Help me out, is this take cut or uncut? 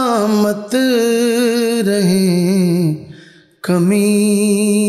uncut